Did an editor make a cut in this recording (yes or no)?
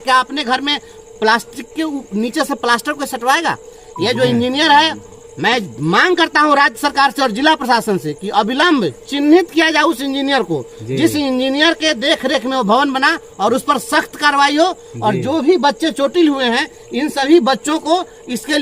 no